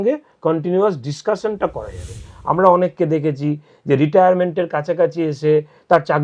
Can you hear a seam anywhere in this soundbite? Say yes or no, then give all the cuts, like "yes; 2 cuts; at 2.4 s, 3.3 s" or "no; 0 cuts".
yes; 1 cut; at 2.3 s